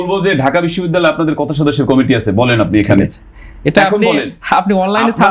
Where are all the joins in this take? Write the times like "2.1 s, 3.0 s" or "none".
none